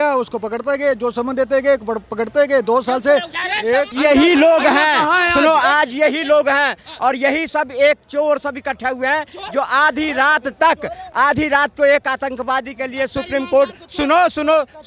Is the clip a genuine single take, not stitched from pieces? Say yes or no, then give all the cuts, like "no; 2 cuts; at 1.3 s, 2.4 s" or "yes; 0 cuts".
yes; 0 cuts